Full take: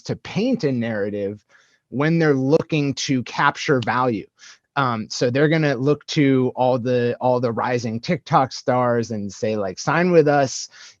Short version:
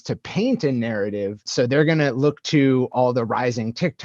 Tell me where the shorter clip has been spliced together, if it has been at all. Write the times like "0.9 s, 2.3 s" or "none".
1.4 s, 2.9 s